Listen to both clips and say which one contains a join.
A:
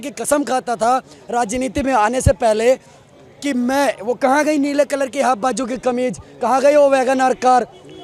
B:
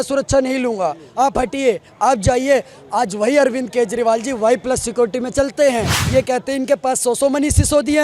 B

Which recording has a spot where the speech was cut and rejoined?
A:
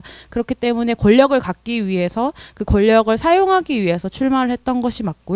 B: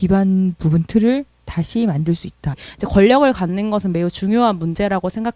B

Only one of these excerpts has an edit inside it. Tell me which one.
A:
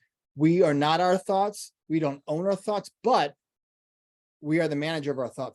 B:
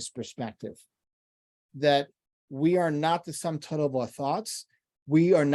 B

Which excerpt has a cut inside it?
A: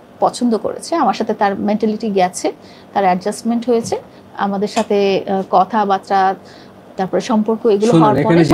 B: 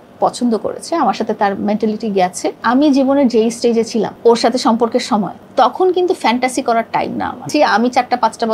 B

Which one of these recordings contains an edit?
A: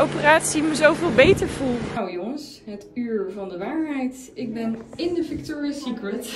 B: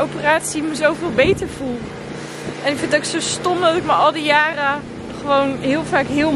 A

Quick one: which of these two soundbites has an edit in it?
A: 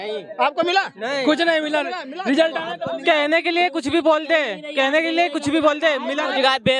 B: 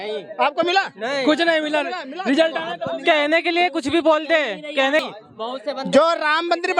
B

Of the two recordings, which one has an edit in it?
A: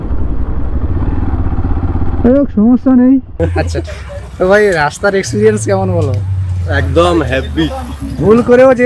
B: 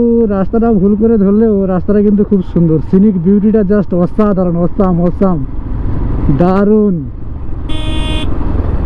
A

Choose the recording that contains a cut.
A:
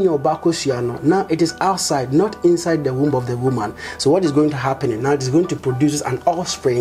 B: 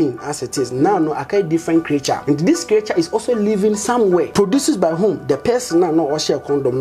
B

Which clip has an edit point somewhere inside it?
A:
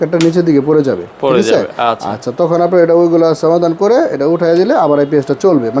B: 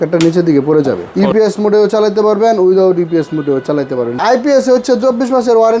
B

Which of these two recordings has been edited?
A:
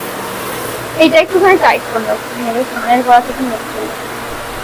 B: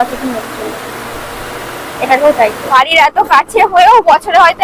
B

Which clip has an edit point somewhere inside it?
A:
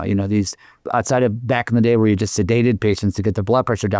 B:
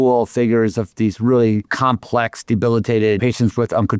B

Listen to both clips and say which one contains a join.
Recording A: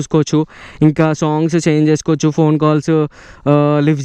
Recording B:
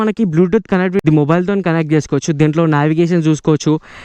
B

